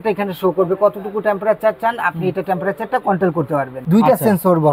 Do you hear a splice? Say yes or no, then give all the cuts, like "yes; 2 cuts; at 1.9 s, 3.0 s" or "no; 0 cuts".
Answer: yes; 1 cut; at 3.8 s